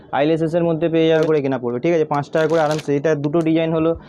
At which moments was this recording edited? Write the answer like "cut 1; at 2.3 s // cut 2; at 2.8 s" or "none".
cut 1; at 1.2 s

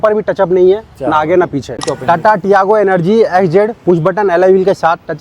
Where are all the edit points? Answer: cut 1; at 1.8 s

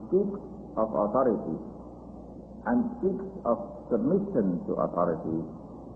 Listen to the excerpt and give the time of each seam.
cut 1; at 3.8 s

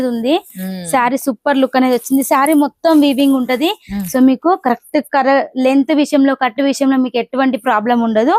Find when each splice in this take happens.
none

